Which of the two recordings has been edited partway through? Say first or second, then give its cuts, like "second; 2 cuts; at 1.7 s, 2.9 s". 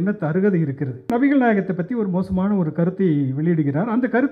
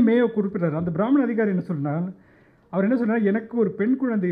first; 1 cut; at 1.1 s